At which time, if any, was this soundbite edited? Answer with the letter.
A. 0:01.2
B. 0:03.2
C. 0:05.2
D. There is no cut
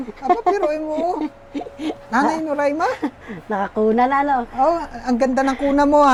D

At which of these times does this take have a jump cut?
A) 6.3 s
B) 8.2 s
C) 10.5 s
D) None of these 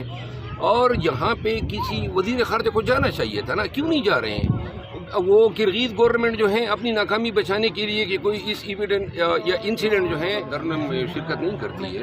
C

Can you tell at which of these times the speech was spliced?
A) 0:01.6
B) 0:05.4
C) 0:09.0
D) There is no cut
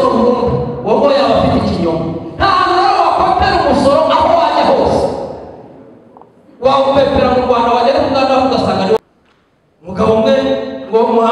C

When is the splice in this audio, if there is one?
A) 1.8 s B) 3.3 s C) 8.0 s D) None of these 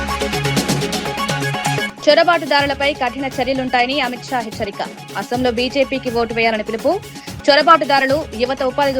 A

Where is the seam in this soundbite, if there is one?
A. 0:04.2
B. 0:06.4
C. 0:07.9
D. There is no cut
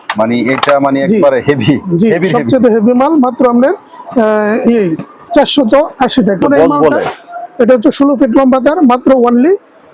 B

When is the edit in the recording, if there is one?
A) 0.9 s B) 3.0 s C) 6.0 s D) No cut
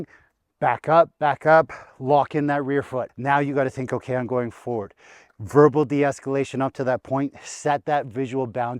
B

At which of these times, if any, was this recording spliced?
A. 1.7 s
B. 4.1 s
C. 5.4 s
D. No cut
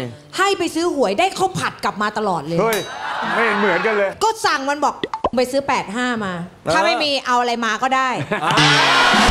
B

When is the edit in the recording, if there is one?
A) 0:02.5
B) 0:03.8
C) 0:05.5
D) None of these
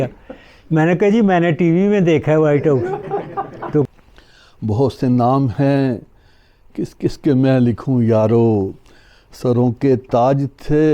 B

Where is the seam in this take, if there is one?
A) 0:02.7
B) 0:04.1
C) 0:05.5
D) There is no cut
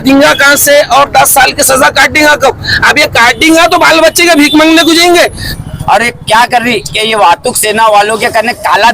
C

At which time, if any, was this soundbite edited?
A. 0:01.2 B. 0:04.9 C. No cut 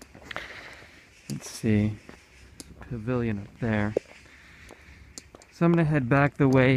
A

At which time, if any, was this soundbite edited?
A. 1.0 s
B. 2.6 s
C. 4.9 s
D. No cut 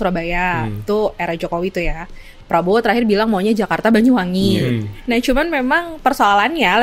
C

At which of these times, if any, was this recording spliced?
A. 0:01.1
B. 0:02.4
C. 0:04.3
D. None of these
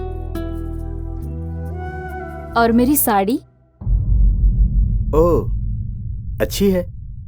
A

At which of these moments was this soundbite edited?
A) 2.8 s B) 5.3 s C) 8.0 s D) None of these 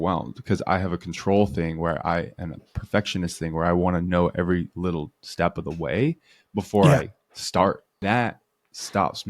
C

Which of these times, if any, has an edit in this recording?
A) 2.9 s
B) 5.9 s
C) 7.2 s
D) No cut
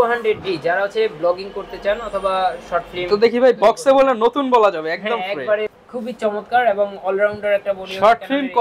B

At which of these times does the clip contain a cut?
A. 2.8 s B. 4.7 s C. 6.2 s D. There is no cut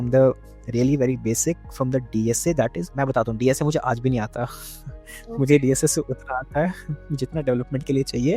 A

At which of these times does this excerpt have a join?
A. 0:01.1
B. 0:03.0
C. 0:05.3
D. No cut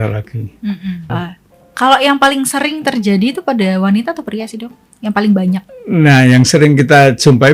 A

